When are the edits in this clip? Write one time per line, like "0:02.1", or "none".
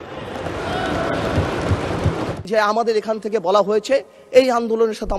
0:02.3

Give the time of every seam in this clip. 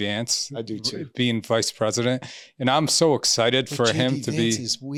none

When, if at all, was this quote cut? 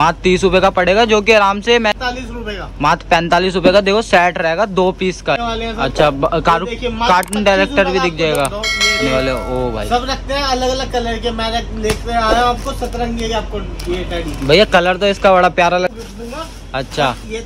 0:02.0
0:05.4
0:09.0
0:15.9

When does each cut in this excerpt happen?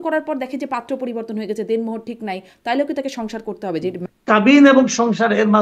0:04.1

